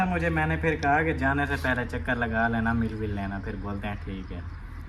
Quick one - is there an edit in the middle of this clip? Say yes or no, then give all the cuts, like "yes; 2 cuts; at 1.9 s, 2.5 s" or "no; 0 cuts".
no; 0 cuts